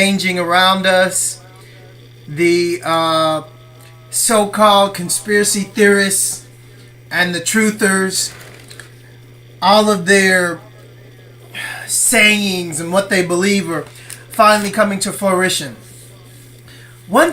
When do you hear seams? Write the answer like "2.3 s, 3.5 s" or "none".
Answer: 9.1 s